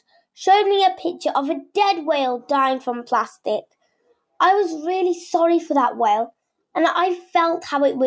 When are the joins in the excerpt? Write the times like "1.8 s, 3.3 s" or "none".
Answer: none